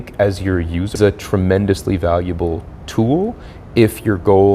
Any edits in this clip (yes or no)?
yes